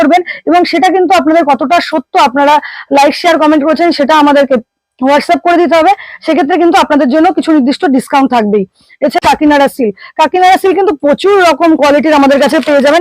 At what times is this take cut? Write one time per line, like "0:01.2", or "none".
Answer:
0:09.2

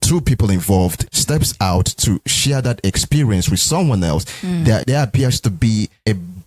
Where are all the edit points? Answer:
0:01.0
0:04.8

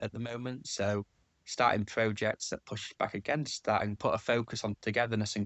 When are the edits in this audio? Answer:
0:04.0

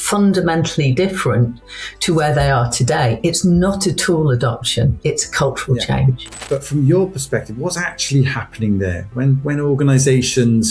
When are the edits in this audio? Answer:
0:06.3

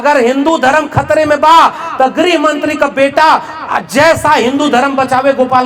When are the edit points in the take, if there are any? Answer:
none

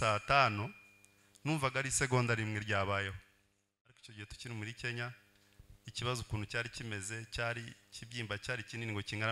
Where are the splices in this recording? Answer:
0:04.1

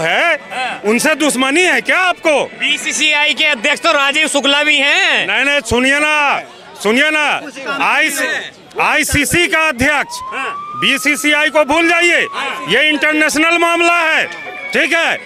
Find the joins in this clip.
none

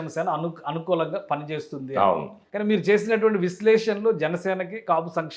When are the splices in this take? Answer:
0:02.4

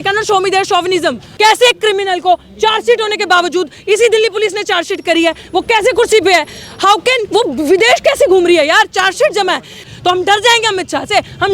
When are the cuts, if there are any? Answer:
0:01.3
0:09.9

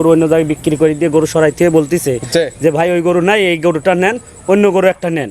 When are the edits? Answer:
none

